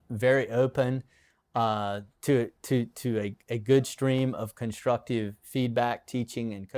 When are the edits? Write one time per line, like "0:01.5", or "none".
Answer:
none